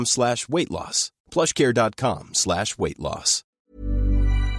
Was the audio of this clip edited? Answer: yes; 1 cut; at 3.6 s

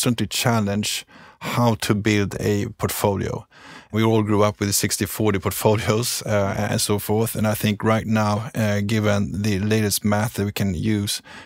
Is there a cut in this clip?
yes; 1 cut; at 3.9 s

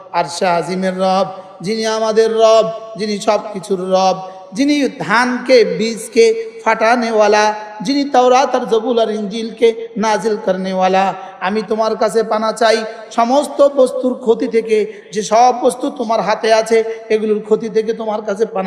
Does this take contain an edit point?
no; 0 cuts

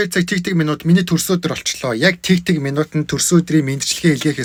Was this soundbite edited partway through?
no; 0 cuts

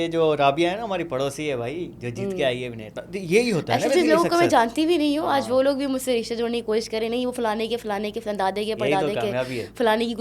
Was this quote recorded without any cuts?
yes; 0 cuts

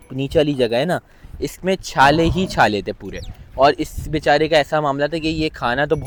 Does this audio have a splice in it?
no; 0 cuts

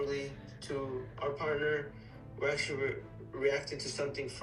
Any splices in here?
no; 0 cuts

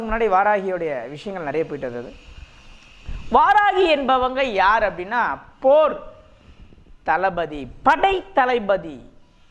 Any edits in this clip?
no; 0 cuts

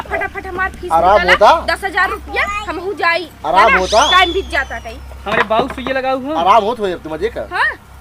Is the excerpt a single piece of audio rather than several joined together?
yes; 0 cuts

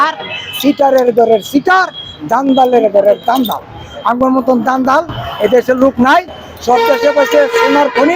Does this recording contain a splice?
no; 0 cuts

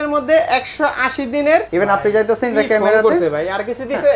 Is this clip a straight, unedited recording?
no; 1 cut; at 1.7 s

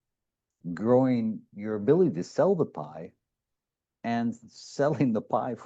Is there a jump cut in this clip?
no; 0 cuts

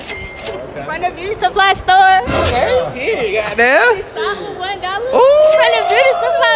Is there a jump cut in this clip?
no; 0 cuts

